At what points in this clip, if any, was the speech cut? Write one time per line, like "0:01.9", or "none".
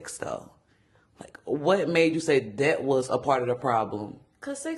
none